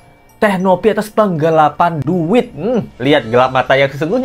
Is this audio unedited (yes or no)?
yes